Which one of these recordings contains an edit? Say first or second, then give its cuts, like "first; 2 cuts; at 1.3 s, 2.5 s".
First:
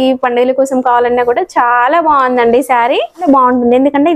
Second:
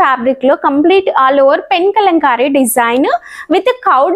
first; 1 cut; at 3.1 s